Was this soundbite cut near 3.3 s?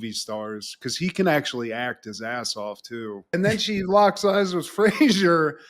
yes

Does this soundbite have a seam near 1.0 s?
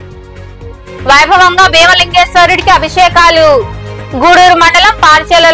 yes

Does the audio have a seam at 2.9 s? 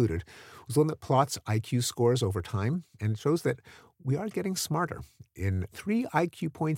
yes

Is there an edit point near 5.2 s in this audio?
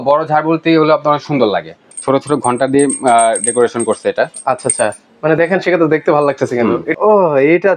no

